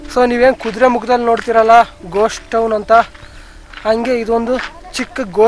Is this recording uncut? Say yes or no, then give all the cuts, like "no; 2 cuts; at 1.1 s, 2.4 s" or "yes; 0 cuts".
yes; 0 cuts